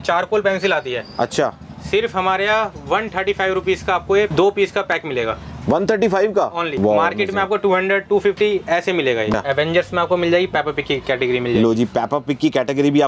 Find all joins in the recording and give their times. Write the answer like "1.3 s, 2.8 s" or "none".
4.3 s, 6.7 s, 9.3 s